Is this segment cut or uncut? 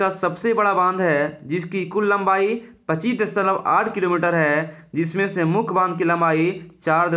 uncut